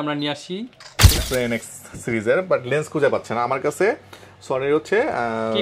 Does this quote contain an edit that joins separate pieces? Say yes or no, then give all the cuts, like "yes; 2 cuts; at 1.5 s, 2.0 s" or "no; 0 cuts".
yes; 1 cut; at 1.2 s